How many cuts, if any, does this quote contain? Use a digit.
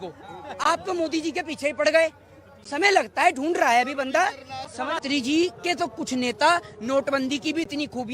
1